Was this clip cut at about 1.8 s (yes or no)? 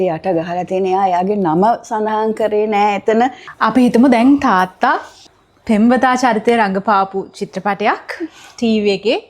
no